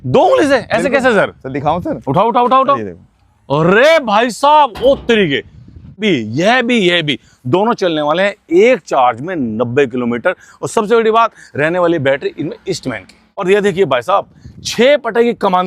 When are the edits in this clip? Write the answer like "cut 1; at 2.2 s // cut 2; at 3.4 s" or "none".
cut 1; at 6.0 s // cut 2; at 13.3 s